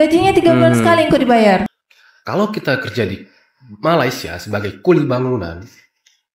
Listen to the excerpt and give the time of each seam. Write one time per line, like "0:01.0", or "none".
0:01.7

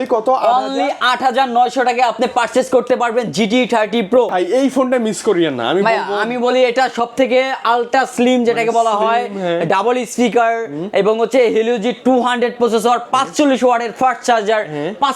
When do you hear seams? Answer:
0:04.3

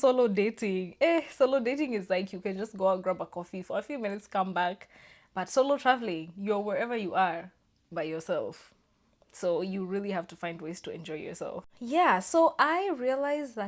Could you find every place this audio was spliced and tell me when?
none

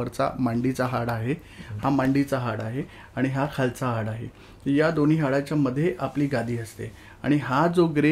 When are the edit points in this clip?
none

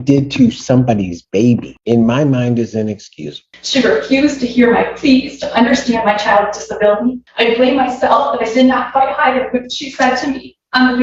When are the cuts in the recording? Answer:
0:03.5

